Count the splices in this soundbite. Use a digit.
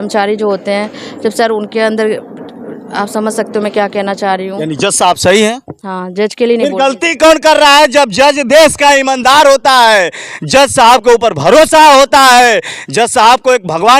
1